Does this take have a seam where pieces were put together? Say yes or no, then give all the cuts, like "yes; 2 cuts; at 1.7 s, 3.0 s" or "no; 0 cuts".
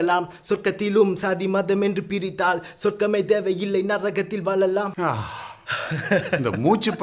yes; 1 cut; at 4.9 s